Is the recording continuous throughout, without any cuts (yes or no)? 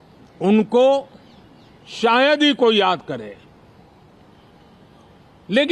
yes